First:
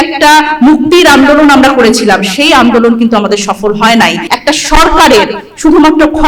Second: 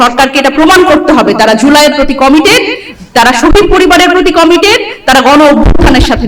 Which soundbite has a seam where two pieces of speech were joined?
first; 1 cut; at 4.3 s

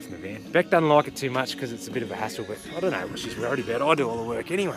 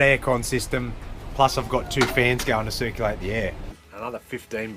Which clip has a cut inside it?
second; 1 cut; at 3.7 s

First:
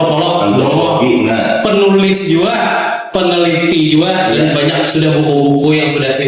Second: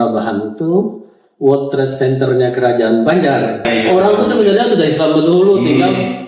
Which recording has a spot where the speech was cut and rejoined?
second; 1 cut; at 3.7 s

